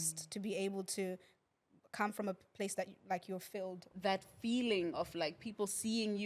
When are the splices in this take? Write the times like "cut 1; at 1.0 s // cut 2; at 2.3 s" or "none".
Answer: cut 1; at 3.8 s